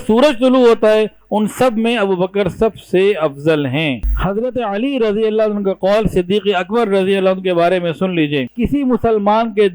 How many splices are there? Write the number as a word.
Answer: two